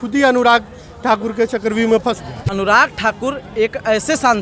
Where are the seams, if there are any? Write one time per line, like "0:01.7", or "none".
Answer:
0:02.3